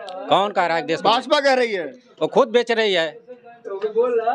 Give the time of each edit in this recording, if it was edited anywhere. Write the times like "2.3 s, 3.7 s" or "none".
none